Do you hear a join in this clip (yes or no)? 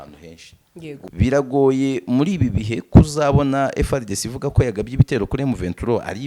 yes